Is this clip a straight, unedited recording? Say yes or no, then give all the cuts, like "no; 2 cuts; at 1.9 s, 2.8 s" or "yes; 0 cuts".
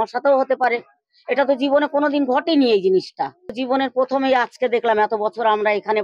no; 1 cut; at 3.6 s